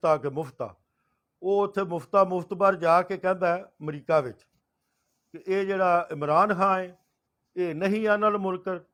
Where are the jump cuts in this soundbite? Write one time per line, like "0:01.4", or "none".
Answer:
none